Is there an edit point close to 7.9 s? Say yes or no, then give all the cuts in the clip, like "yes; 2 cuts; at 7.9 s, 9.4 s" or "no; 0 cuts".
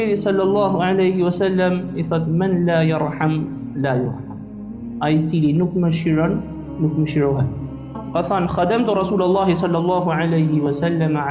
yes; 1 cut; at 7.9 s